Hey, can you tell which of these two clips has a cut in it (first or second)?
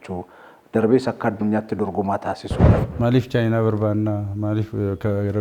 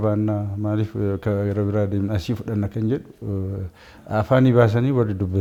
first